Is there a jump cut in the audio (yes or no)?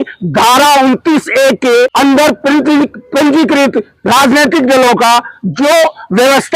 yes